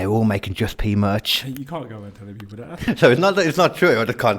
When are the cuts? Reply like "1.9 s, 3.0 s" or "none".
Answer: 2.8 s